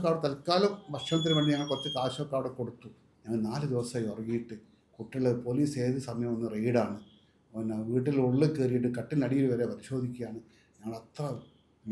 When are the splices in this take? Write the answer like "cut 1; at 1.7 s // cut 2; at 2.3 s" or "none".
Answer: cut 1; at 3.1 s